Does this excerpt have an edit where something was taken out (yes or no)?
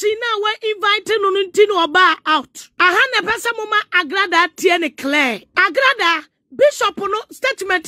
yes